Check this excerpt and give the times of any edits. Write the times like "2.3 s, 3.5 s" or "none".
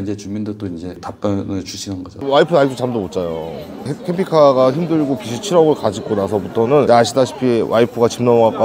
2.2 s